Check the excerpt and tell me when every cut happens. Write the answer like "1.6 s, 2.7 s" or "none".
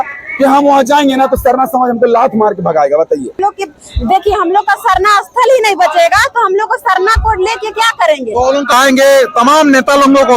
3.4 s, 8.7 s